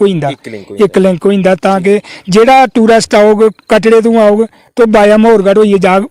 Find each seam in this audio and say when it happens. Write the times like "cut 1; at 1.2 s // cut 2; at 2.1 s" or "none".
none